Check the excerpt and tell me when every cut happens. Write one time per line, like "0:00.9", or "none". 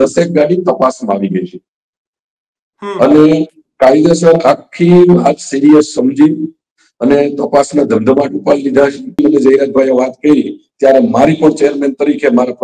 0:09.2